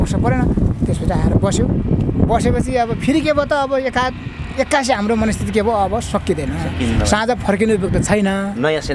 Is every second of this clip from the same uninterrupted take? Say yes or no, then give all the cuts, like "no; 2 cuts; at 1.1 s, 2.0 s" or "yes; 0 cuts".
yes; 0 cuts